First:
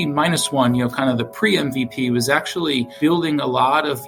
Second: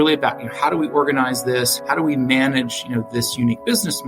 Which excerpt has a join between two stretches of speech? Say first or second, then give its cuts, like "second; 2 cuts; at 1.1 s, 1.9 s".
second; 1 cut; at 1.7 s